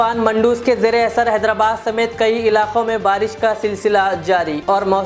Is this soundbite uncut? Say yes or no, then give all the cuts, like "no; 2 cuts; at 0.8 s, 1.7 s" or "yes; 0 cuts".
yes; 0 cuts